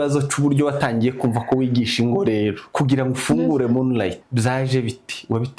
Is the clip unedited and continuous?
no; 2 cuts; at 2.6 s, 4.2 s

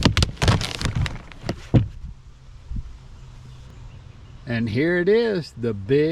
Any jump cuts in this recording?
yes; 1 cut; at 3.7 s

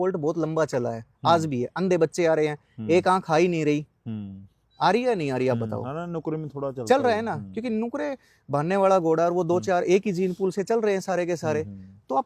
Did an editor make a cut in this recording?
no; 0 cuts

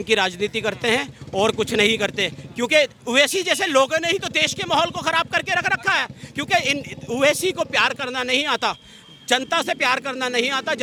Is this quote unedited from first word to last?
yes; 0 cuts

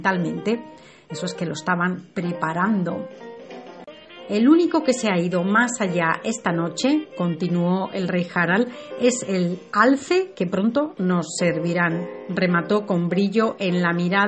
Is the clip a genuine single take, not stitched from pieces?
no; 1 cut; at 6.9 s

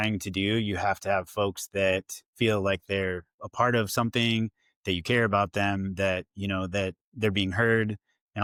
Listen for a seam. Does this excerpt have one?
no; 0 cuts

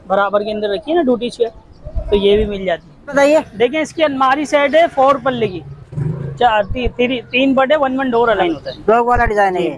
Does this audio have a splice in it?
yes; 2 cuts; at 3.1 s, 8.4 s

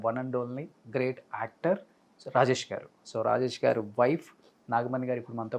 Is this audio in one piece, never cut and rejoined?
no; 1 cut; at 3.1 s

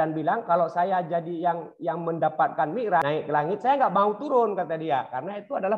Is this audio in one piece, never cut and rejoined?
no; 1 cut; at 3.0 s

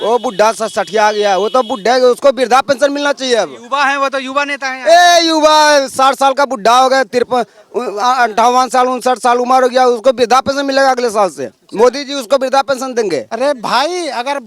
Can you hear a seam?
yes; 1 cut; at 13.3 s

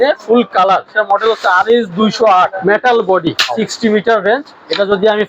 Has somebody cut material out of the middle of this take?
yes; 3 cuts; at 0.9 s, 2.6 s, 3.5 s

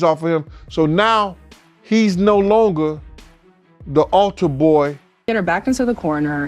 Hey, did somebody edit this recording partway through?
yes; 1 cut; at 5.3 s

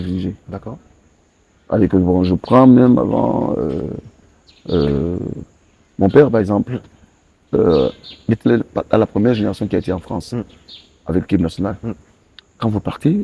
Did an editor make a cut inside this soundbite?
no; 0 cuts

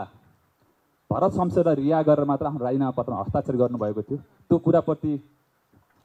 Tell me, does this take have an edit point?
no; 0 cuts

